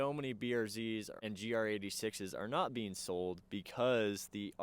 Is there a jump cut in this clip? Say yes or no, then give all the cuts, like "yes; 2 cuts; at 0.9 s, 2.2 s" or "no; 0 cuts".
yes; 1 cut; at 1.1 s